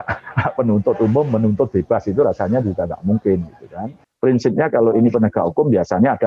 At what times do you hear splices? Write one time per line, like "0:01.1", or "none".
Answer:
0:04.0